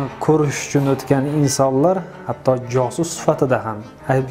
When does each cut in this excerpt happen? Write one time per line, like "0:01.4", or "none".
none